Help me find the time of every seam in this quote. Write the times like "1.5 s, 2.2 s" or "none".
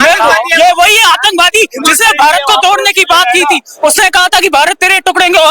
none